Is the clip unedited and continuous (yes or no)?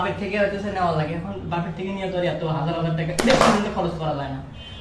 yes